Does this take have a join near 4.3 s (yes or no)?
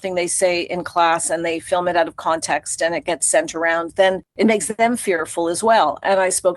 yes